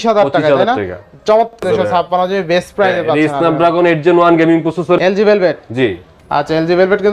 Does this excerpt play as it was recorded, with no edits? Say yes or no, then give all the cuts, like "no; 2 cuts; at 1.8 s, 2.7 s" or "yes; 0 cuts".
no; 2 cuts; at 1.6 s, 5.0 s